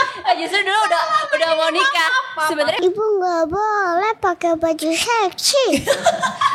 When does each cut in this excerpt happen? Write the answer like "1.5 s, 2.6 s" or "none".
2.8 s